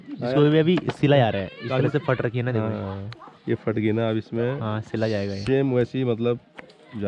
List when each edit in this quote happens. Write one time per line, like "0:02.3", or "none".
none

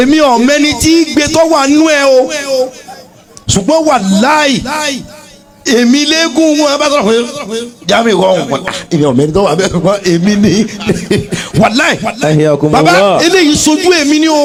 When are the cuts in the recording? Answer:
none

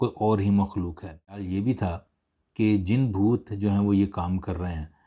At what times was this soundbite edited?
0:01.4

